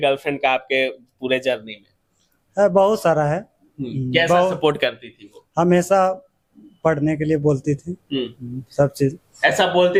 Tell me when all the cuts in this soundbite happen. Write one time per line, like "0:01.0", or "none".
none